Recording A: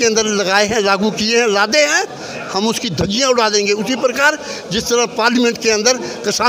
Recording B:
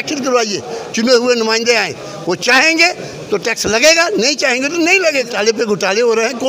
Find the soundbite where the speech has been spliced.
B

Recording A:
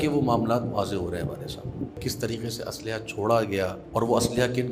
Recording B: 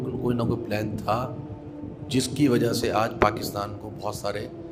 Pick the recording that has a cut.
A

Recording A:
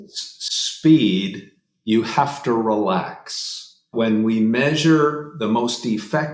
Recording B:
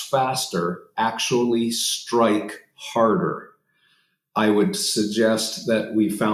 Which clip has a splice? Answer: A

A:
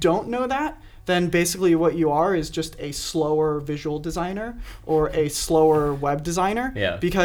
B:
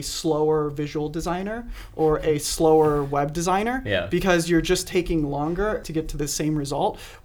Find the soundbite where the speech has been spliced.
B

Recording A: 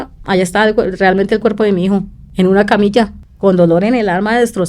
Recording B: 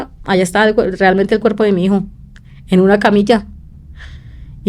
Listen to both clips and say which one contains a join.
A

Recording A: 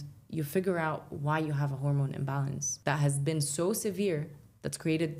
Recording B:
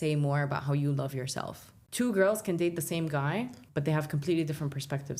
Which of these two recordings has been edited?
B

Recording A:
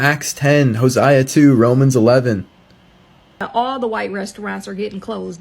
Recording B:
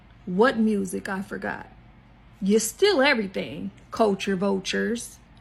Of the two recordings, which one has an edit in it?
A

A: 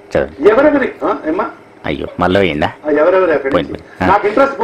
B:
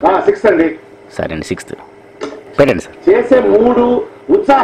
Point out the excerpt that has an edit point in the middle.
B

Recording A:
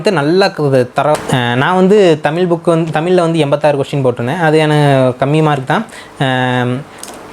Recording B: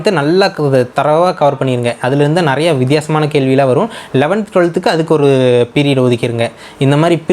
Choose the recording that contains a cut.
A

